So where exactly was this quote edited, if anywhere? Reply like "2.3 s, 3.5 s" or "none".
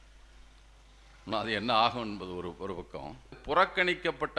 3.4 s